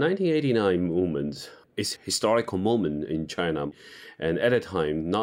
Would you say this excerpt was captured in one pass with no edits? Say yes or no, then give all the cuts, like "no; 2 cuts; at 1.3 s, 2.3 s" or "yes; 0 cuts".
no; 2 cuts; at 1.9 s, 3.7 s